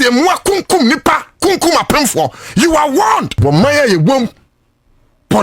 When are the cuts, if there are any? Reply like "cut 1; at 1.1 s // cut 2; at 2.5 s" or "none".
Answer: cut 1; at 3.3 s

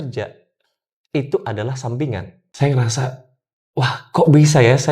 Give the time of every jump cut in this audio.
cut 1; at 2.4 s

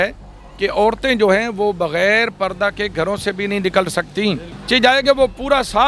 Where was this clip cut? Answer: cut 1; at 4.5 s

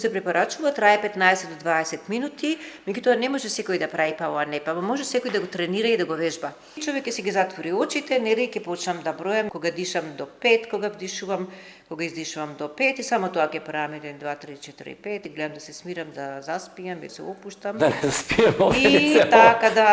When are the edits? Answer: cut 1; at 6.8 s // cut 2; at 9.5 s // cut 3; at 15.2 s // cut 4; at 17.1 s

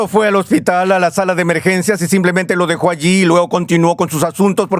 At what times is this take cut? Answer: none

